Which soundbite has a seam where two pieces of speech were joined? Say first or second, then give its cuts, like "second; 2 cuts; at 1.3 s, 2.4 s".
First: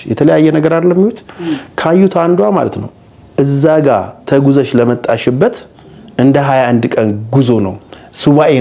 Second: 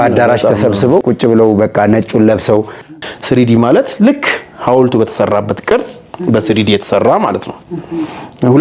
second; 1 cut; at 2.9 s